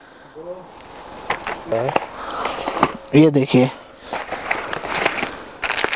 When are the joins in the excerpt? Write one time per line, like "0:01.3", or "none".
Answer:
0:01.7